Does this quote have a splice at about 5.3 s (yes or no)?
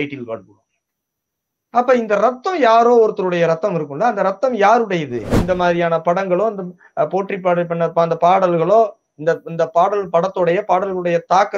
yes